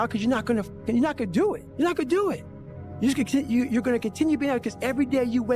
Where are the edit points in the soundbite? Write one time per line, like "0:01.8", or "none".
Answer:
0:01.7

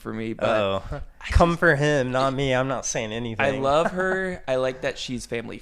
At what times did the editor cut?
none

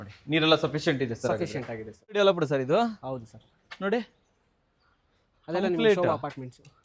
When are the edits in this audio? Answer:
0:02.1

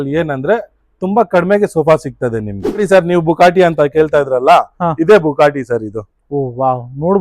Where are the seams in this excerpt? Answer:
0:02.8

